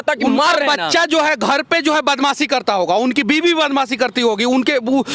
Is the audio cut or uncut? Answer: uncut